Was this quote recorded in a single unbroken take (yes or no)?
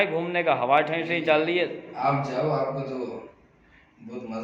yes